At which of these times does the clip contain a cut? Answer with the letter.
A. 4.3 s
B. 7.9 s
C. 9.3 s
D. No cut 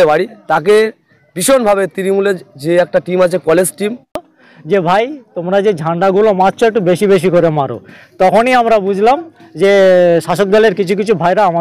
A